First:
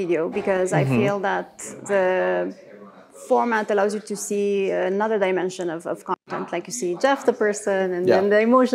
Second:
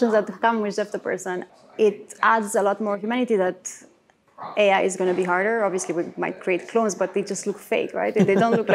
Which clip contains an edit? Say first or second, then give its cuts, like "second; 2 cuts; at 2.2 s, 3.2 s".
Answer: second; 1 cut; at 1.5 s